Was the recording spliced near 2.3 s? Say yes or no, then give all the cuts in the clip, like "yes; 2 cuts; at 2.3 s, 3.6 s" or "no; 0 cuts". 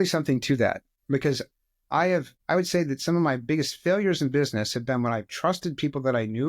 yes; 2 cuts; at 0.9 s, 2.3 s